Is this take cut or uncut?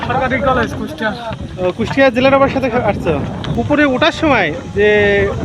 cut